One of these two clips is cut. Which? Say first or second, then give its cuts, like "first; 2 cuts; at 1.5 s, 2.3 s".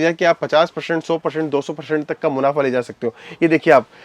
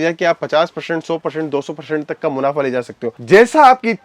second; 1 cut; at 3.1 s